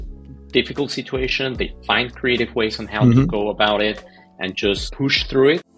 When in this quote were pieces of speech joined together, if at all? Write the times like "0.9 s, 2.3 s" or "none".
4.9 s